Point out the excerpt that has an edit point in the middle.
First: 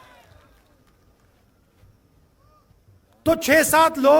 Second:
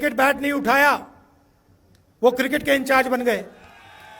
first; 1 cut; at 2.7 s

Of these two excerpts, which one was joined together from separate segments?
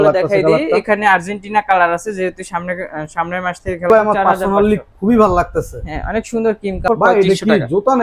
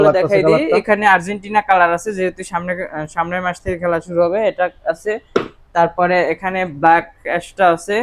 first; 2 cuts; at 3.9 s, 6.8 s

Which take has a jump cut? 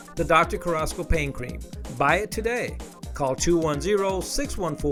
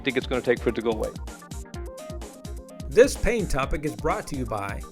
second; 2 cuts; at 1.1 s, 2.9 s

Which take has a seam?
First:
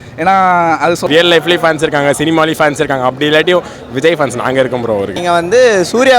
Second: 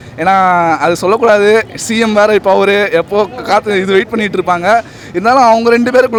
first; 2 cuts; at 1.0 s, 5.2 s

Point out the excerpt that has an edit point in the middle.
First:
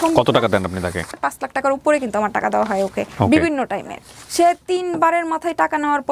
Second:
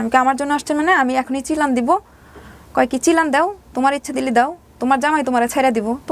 first; 2 cuts; at 1.2 s, 4.1 s

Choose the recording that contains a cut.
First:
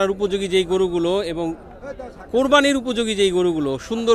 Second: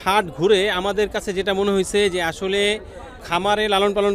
second; 1 cut; at 3.2 s

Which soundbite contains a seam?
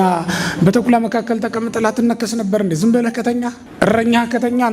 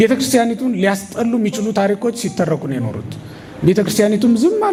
first; 1 cut; at 3.6 s

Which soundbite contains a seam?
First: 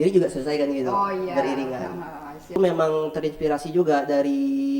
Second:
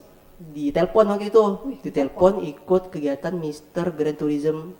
first; 1 cut; at 2.6 s

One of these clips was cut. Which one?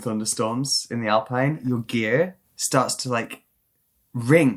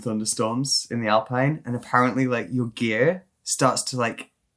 first; 1 cut; at 1.6 s

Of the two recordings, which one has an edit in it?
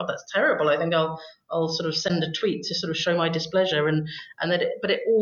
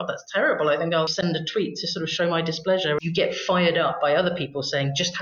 second; 2 cuts; at 1.1 s, 3.0 s

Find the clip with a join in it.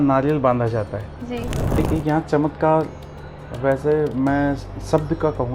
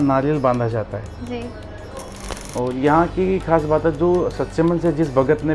first; 1 cut; at 1.7 s

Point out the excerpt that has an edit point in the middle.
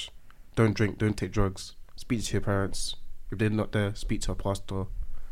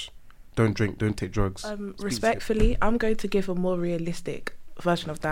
second; 1 cut; at 2.0 s

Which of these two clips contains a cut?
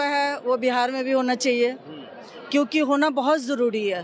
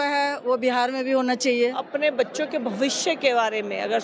second; 1 cut; at 1.8 s

